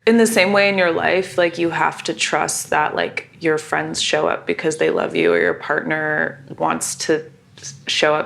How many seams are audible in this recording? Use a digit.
0